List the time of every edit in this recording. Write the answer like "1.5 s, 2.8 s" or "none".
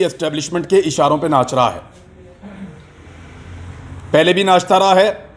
none